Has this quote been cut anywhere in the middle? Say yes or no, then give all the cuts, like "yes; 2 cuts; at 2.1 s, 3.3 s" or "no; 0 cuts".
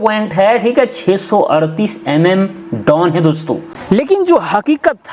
yes; 1 cut; at 3.7 s